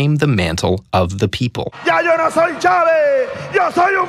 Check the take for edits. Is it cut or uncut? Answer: cut